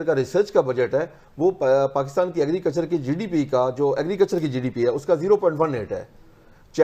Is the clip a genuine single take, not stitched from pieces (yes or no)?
yes